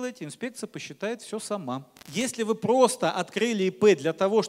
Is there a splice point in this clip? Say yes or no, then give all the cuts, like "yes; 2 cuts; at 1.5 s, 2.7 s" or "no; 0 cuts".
yes; 1 cut; at 2.0 s